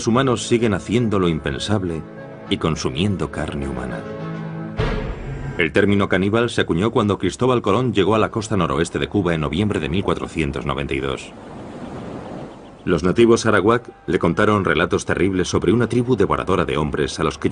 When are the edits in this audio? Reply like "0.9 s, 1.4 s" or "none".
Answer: none